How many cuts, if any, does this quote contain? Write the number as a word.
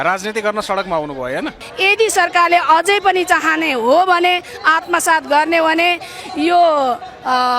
one